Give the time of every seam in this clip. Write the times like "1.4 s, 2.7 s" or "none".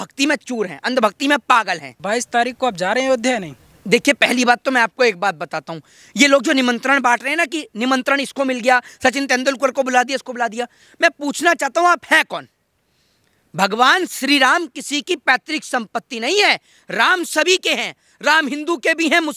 none